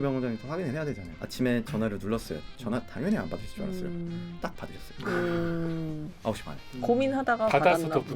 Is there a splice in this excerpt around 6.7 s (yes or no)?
no